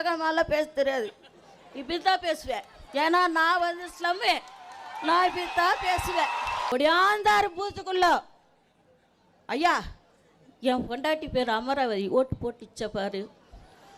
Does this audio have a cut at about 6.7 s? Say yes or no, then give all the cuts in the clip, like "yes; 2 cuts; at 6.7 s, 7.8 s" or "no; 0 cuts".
yes; 1 cut; at 6.7 s